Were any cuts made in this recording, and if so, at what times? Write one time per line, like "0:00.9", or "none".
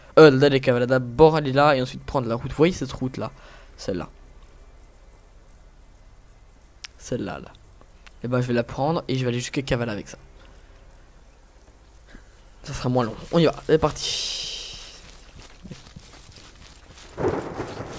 0:15.5